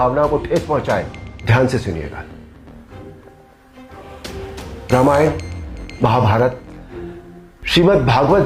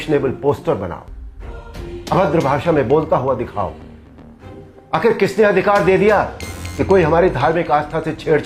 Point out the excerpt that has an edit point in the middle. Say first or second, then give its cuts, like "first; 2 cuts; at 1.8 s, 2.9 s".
first; 3 cuts; at 1.2 s, 2.2 s, 4.5 s